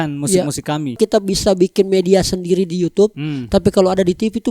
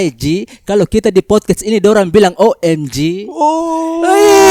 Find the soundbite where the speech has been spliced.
first; 1 cut; at 1.0 s

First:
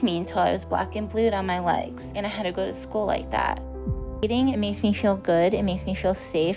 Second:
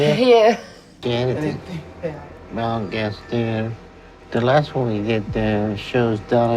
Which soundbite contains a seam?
second; 1 cut; at 0.9 s

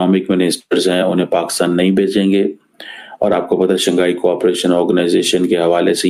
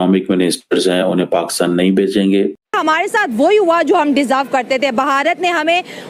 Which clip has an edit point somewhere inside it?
second; 1 cut; at 2.8 s

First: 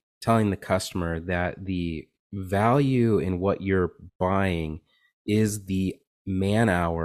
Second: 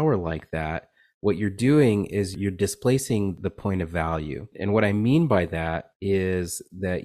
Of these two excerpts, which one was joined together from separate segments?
second; 3 cuts; at 2.3 s, 3.4 s, 4.5 s

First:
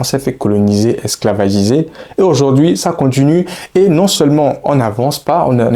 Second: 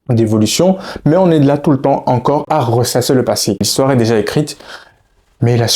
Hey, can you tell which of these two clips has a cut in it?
second; 1 cut; at 3.6 s

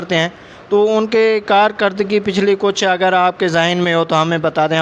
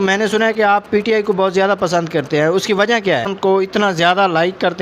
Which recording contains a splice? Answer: second; 1 cut; at 3.3 s

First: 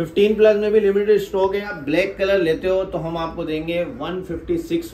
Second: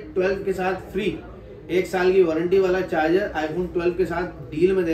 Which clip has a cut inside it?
first; 1 cut; at 1.8 s

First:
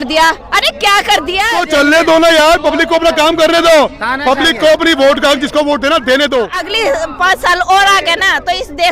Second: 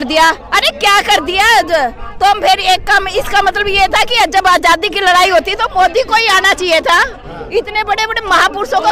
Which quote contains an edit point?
first; 2 cuts; at 1.6 s, 6.6 s

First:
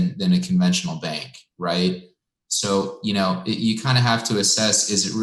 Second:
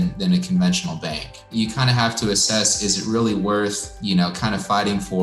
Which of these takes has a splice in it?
second; 2 cuts; at 1.5 s, 3.9 s

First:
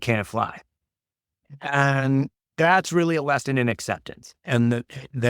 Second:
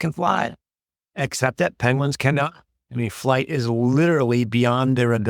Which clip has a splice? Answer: first; 1 cut; at 1.4 s

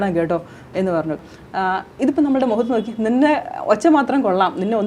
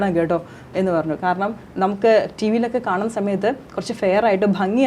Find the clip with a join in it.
first; 1 cut; at 1.2 s

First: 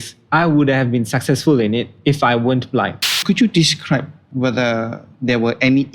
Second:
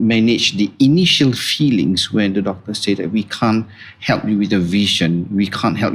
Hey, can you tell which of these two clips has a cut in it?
first; 3 cuts; at 3.1 s, 4.2 s, 5.1 s

